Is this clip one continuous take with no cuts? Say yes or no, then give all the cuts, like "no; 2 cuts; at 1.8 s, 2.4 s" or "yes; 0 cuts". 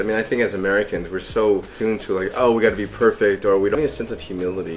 no; 2 cuts; at 1.7 s, 3.7 s